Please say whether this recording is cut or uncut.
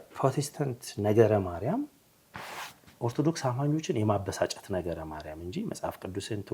uncut